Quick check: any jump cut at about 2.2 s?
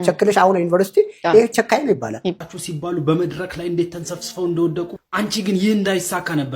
yes; 1 cut; at 2.2 s

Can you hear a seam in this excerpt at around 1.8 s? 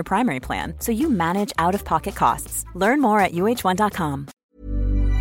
no; 1 cut; at 4.3 s

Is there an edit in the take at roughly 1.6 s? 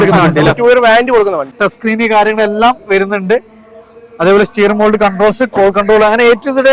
yes; 1 cut; at 1.6 s

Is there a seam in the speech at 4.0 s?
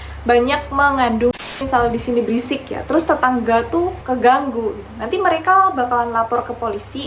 yes; 2 cuts; at 1.4 s, 4.0 s

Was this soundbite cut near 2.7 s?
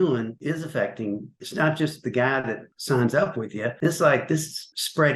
yes; 1 cut; at 2.7 s

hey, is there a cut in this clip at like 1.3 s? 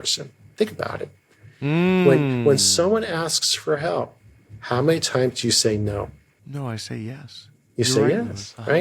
no; 1 cut; at 6.3 s

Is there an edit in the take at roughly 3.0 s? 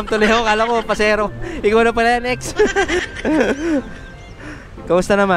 yes; 1 cut; at 3.0 s

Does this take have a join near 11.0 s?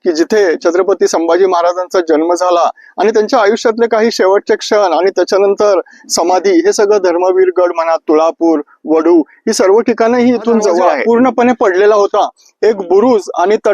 yes; 1 cut; at 11.0 s

